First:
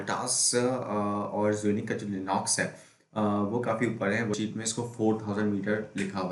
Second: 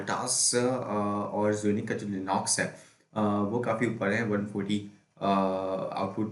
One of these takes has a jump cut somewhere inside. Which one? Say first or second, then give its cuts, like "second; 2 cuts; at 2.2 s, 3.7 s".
first; 1 cut; at 4.3 s